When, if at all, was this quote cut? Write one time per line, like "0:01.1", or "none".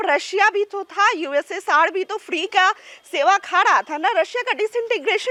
none